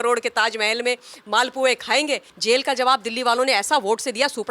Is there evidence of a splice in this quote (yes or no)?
yes